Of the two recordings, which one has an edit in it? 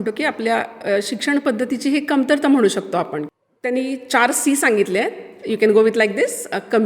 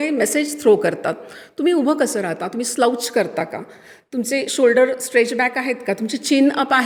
first; 1 cut; at 3.2 s

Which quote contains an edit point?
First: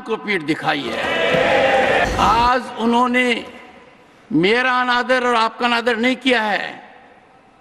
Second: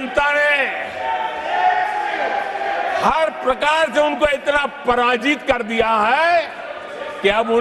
first; 1 cut; at 2.0 s

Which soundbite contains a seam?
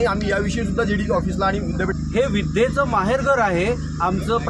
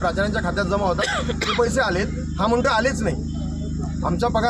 first; 1 cut; at 1.9 s

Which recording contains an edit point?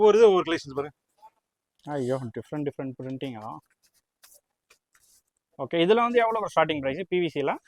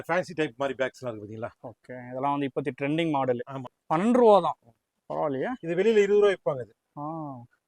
second; 1 cut; at 3.7 s

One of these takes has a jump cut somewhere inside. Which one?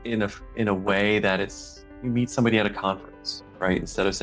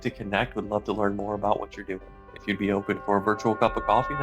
second; 1 cut; at 2.3 s

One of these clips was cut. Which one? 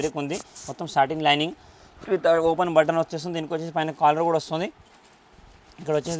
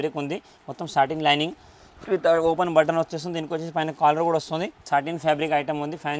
second; 1 cut; at 4.9 s

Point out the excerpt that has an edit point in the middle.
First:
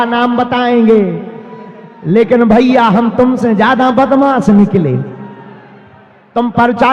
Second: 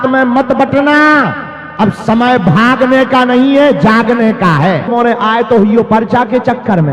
second; 1 cut; at 4.9 s

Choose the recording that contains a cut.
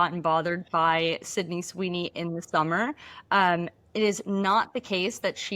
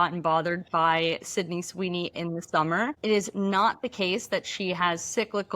second; 1 cut; at 3.0 s

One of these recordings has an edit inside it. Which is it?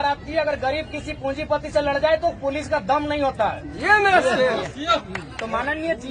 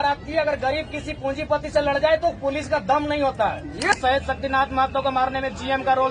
second; 1 cut; at 3.9 s

